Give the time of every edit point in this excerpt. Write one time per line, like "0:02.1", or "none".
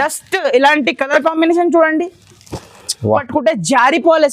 0:03.2